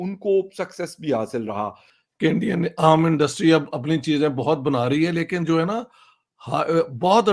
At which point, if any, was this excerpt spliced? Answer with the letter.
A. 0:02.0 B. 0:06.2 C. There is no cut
A